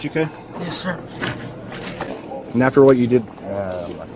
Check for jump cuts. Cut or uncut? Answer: uncut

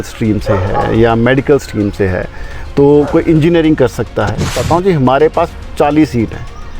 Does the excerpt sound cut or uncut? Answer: cut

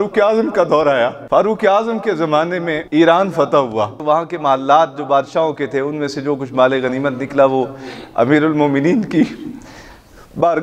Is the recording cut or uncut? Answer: cut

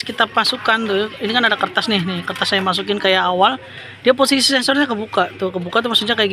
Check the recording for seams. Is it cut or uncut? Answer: uncut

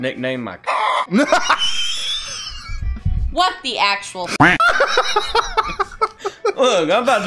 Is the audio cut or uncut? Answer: uncut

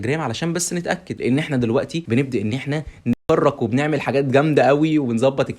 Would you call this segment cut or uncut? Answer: cut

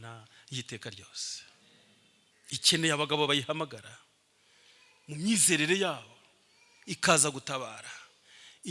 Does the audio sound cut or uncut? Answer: cut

